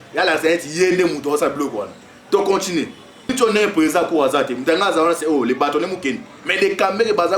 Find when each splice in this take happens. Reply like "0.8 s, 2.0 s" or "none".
3.3 s